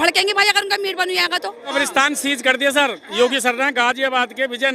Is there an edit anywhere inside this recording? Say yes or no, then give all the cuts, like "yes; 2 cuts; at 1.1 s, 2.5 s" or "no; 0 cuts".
yes; 1 cut; at 1.7 s